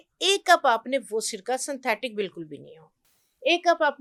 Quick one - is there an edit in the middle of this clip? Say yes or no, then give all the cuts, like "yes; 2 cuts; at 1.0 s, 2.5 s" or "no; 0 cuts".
no; 0 cuts